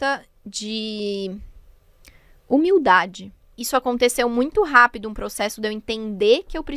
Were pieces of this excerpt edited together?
yes; 1 cut; at 3.5 s

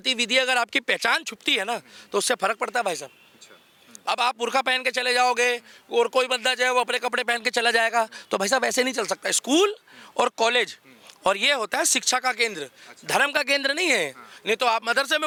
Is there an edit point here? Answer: no; 0 cuts

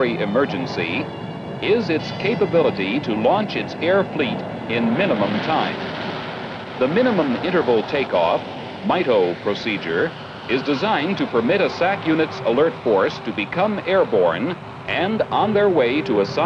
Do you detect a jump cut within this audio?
no; 0 cuts

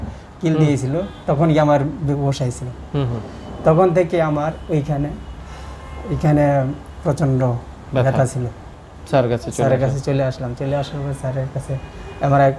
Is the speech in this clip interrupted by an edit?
yes; 1 cut; at 8.7 s

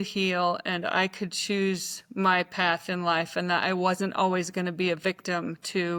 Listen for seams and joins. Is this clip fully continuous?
yes; 0 cuts

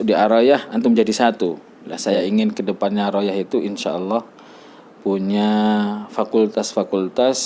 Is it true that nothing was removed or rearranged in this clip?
no; 1 cut; at 2.2 s

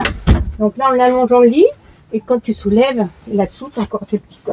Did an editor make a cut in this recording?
no; 0 cuts

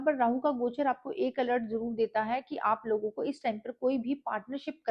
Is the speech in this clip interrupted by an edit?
no; 0 cuts

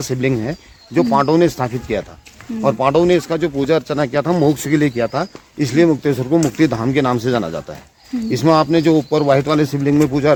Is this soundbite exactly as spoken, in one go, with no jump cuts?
yes; 0 cuts

